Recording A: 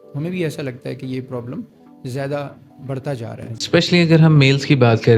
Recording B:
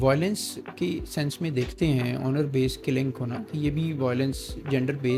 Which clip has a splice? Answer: A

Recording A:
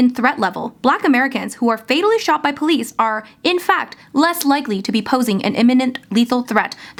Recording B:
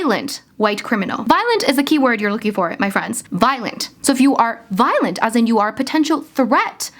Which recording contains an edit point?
B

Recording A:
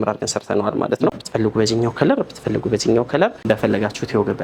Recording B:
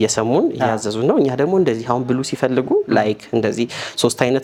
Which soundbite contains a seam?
A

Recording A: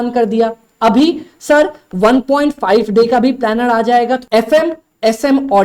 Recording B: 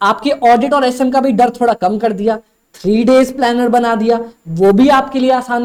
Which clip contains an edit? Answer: A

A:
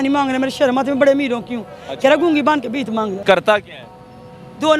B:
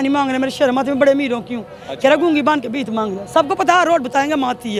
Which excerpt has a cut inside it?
A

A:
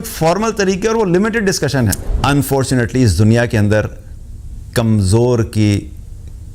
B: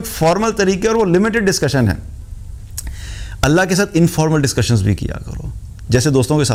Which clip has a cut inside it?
A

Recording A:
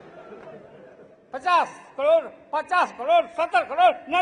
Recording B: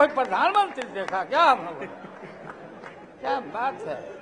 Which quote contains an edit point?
B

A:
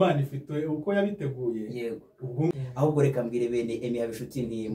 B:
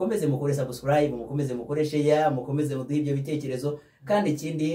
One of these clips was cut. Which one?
A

